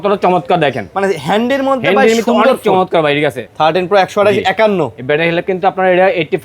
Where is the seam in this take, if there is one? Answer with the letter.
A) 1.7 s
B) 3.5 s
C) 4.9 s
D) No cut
B